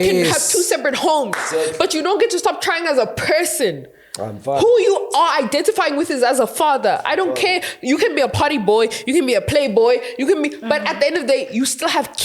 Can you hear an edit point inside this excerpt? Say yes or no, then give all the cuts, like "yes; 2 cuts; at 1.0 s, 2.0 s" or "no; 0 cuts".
no; 0 cuts